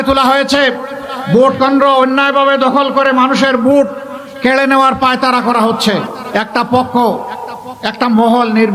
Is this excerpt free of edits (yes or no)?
no